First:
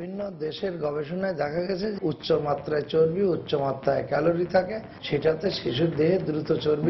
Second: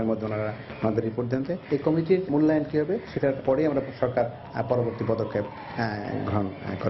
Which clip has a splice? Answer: first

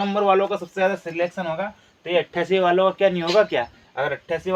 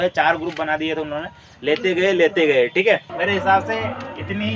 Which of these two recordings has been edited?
second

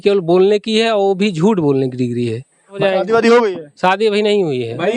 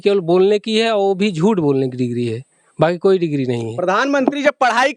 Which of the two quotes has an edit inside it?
first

